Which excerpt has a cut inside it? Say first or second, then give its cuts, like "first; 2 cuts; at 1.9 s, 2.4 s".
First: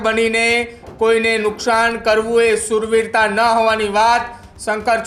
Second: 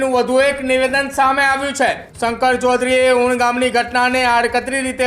second; 1 cut; at 2.1 s